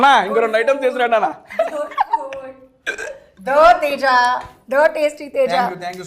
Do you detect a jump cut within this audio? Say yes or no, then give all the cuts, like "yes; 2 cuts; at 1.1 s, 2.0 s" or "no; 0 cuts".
no; 0 cuts